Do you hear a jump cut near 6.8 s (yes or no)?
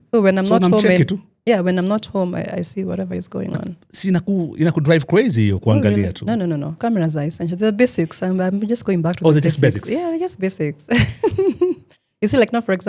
yes